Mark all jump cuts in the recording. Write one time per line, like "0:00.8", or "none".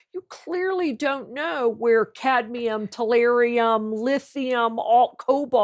none

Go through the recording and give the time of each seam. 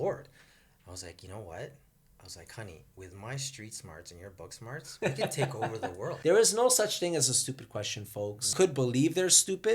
0:06.2
0:08.4

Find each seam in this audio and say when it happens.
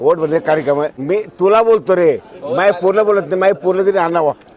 0:01.0

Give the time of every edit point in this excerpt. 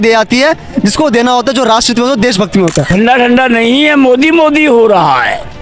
0:02.9

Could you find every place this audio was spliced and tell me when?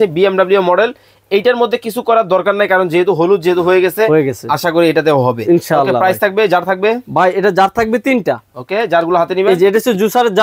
none

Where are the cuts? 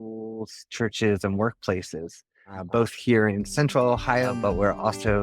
0:04.3

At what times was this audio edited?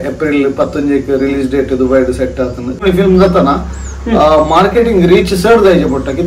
0:02.8

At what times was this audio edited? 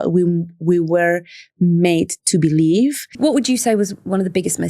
0:03.1

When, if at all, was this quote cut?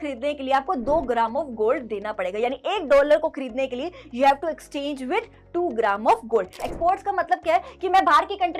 0:06.6

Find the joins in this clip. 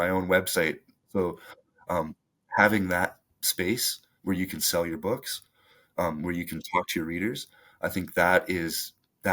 none

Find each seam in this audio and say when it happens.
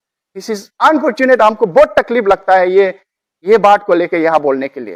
none

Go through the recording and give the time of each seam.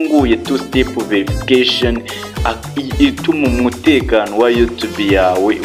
none

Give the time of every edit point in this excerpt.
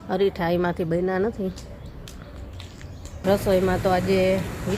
0:03.1

